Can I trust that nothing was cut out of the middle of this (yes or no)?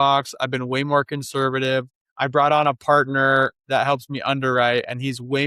no